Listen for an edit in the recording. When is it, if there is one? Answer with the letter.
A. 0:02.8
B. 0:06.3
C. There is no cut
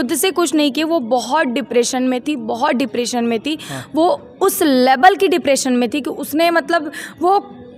C